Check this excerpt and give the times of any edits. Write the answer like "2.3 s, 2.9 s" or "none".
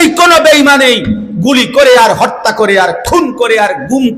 none

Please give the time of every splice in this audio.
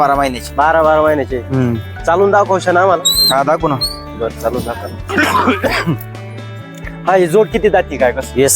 5.1 s

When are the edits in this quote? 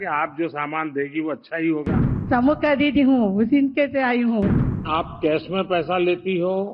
2.2 s, 4.9 s

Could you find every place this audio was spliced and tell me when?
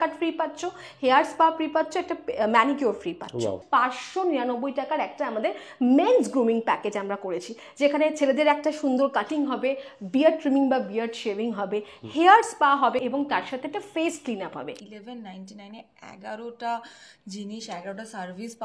3.6 s, 13.0 s, 14.8 s

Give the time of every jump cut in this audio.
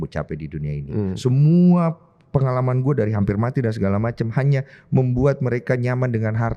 none

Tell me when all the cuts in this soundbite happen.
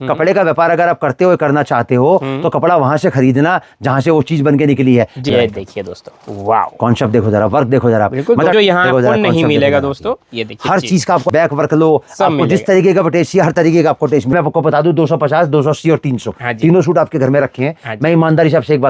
5.3 s, 8.5 s, 11.2 s, 14.3 s

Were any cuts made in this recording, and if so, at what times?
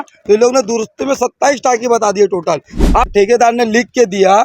3.1 s

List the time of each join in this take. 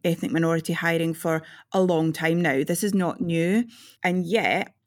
3.9 s

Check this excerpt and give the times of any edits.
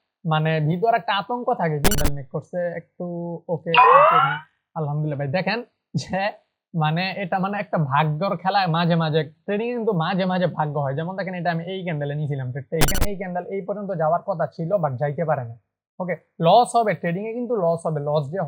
2.0 s, 12.9 s

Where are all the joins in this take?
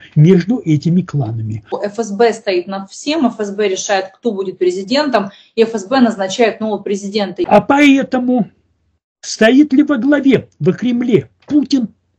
1.8 s, 7.5 s

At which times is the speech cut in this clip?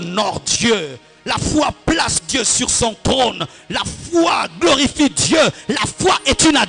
none

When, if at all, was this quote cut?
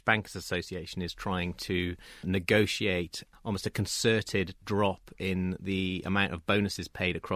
3.2 s

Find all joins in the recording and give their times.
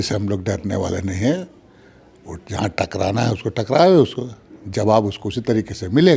none

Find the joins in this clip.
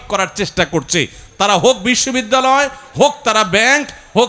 none

